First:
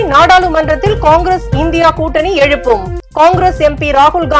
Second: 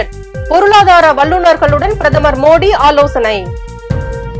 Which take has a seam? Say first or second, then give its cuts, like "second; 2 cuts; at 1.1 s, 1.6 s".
second; 1 cut; at 3.5 s